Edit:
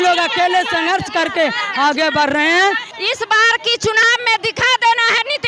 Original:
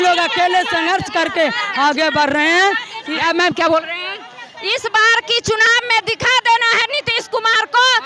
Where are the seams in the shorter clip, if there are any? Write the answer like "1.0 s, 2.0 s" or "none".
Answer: 2.9 s